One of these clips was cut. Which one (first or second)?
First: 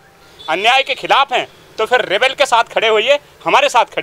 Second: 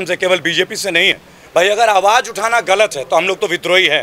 second